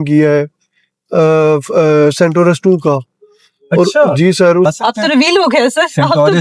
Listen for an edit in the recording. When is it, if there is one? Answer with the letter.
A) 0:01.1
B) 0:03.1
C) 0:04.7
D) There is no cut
C